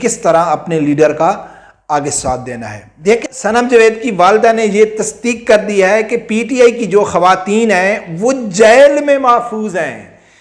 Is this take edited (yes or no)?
yes